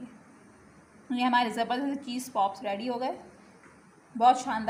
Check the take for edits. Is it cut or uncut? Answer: uncut